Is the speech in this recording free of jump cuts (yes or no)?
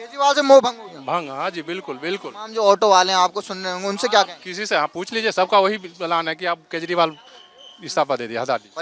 yes